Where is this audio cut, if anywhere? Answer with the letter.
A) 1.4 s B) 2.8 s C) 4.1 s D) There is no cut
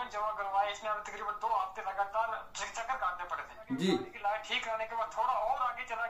C